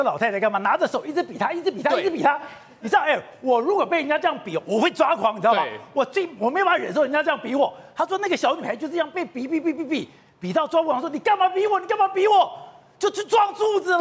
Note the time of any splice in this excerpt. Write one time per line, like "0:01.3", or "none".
none